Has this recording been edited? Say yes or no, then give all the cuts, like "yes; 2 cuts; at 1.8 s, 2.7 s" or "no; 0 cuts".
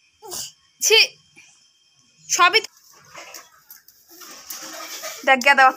yes; 1 cut; at 2.6 s